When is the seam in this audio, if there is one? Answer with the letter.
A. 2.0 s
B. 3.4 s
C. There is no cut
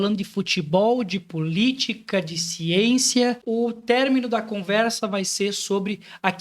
B